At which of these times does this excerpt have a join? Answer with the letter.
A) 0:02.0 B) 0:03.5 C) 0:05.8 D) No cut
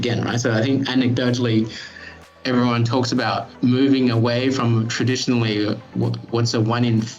B